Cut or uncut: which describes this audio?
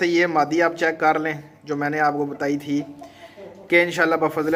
uncut